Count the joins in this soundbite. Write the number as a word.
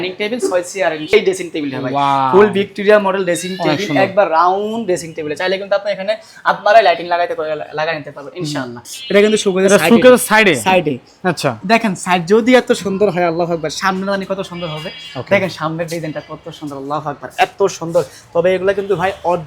two